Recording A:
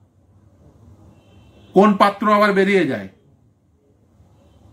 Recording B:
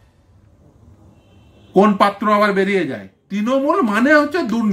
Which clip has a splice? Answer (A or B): B